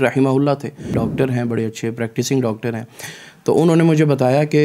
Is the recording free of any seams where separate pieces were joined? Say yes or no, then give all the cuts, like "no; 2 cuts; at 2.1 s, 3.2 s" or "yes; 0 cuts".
no; 1 cut; at 1.0 s